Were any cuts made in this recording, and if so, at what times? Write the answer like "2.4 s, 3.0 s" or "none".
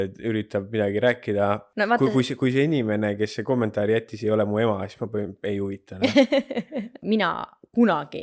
1.7 s, 7.0 s